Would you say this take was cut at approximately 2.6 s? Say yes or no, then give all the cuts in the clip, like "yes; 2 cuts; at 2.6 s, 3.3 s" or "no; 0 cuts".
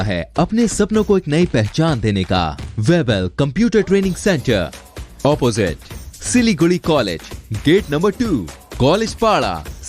yes; 1 cut; at 2.6 s